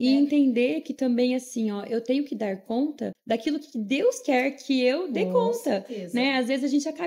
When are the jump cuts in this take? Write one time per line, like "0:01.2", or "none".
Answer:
0:03.1